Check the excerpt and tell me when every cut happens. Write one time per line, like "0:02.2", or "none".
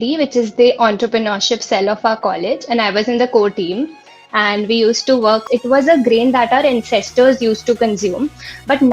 0:05.4